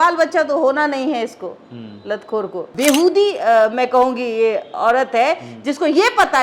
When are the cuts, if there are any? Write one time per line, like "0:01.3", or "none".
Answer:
0:02.7